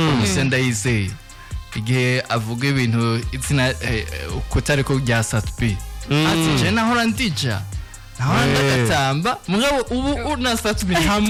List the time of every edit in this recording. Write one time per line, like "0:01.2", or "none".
none